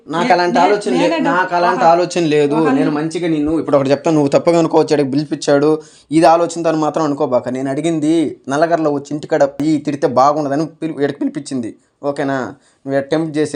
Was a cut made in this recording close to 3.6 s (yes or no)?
no